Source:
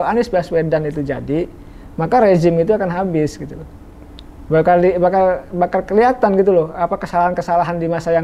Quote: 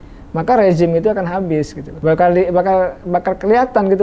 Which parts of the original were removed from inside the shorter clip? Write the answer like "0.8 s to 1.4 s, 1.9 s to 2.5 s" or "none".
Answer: 3.5 s to 4.3 s